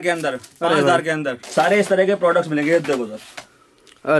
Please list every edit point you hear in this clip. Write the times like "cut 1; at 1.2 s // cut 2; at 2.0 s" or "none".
cut 1; at 1.4 s